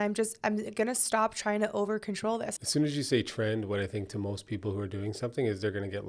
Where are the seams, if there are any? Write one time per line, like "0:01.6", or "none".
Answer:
0:02.5